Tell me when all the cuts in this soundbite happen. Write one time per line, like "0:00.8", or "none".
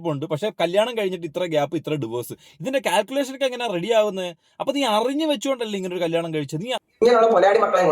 0:06.8

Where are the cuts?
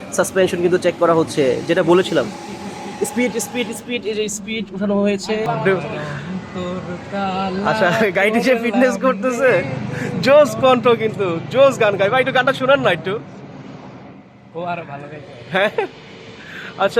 0:05.3

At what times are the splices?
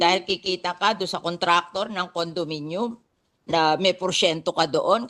none

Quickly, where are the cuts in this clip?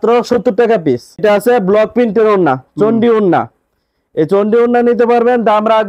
0:01.2

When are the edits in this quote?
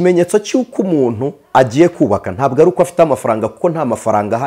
none

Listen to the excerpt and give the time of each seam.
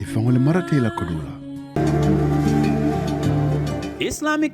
0:01.7

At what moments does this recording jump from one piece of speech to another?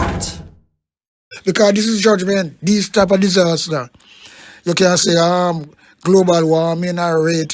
0:01.3

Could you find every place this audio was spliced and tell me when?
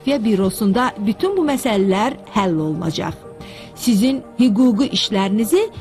0:02.0

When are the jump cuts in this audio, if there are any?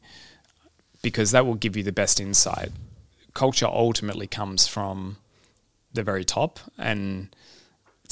none

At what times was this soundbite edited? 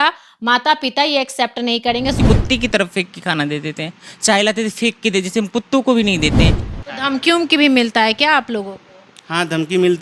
0:02.2
0:06.7

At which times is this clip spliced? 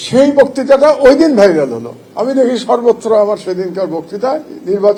none

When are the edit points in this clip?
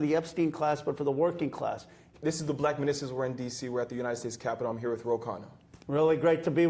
0:02.0

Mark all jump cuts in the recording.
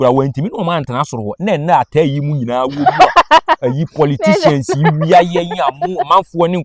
none

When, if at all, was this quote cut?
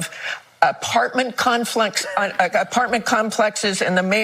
0:02.7

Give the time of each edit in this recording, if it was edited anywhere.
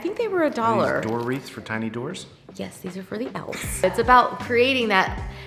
0:03.8

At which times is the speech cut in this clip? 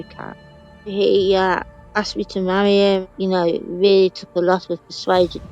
0:00.9
0:03.0

